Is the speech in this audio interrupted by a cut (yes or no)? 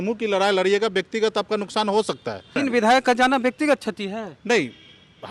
yes